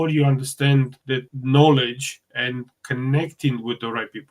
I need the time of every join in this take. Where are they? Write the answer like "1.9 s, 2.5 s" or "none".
1.3 s